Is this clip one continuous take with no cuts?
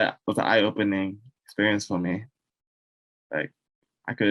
yes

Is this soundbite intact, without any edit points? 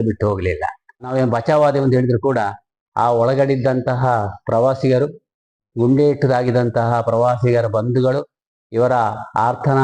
no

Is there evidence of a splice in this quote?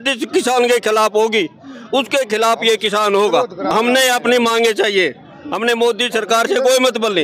yes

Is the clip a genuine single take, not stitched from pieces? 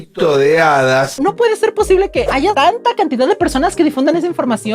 no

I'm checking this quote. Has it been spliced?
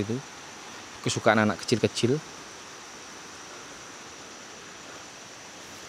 no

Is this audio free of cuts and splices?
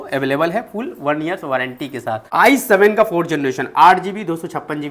no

